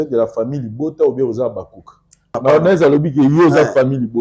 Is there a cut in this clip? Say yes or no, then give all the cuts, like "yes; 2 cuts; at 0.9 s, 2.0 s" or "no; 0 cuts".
yes; 1 cut; at 2.3 s